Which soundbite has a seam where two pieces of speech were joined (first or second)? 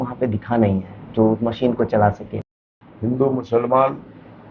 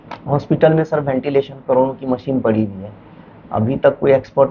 first